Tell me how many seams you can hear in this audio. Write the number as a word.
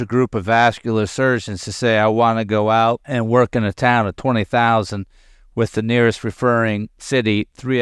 one